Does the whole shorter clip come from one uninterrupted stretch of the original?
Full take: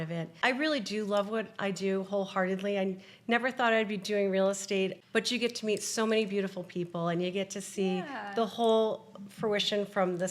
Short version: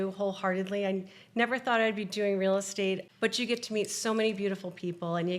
yes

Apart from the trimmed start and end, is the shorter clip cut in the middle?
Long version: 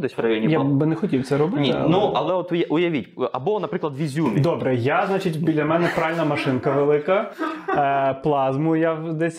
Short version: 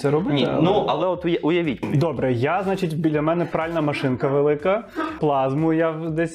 yes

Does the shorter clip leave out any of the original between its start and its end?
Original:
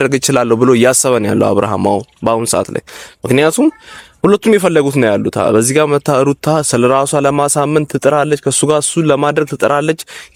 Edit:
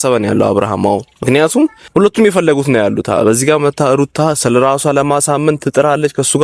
yes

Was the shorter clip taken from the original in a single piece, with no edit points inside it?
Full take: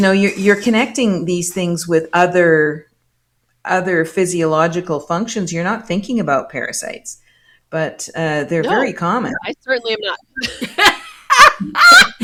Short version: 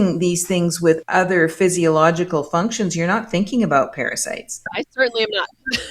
no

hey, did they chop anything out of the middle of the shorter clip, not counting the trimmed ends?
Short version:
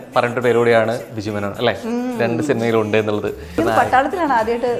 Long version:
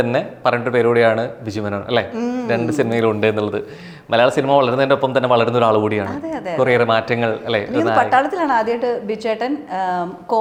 yes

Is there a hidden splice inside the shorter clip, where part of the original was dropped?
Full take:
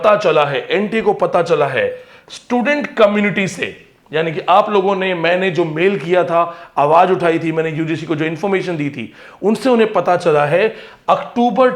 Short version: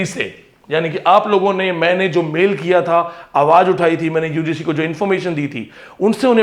no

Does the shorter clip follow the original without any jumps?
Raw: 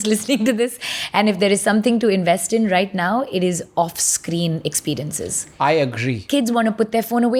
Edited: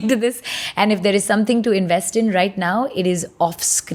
yes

